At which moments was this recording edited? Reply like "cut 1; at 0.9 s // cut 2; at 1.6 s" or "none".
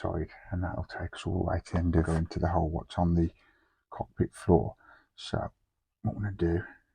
cut 1; at 2.1 s